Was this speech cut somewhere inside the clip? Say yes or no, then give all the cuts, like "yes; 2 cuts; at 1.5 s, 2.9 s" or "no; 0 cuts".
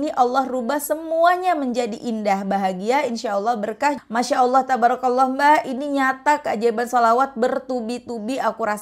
yes; 1 cut; at 4.0 s